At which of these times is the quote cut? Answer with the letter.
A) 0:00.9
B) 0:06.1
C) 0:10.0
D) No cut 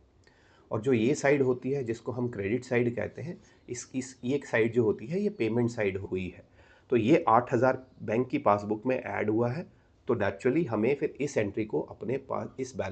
B